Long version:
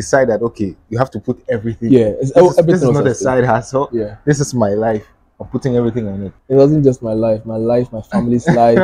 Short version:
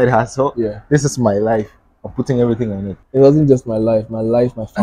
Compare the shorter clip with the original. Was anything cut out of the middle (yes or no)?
no